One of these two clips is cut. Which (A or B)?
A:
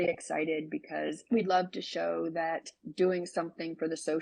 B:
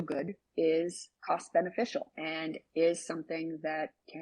B